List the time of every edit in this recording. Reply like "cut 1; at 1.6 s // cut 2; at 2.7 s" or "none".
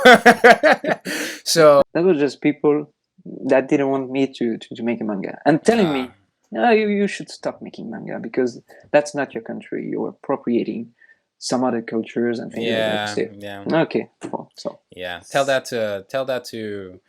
cut 1; at 1.9 s